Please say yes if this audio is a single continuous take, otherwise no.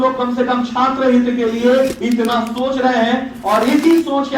yes